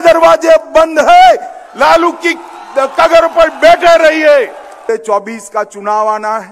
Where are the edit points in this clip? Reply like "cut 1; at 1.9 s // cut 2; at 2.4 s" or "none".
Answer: cut 1; at 4.8 s